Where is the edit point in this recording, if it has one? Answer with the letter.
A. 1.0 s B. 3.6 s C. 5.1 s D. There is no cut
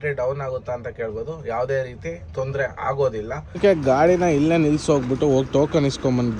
B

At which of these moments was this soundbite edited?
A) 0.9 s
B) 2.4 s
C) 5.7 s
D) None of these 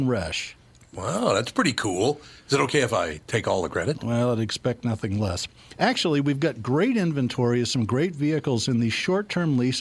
D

